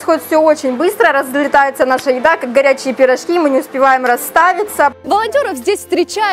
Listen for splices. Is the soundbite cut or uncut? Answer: cut